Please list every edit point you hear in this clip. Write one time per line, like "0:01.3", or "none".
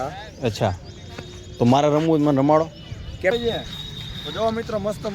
0:03.3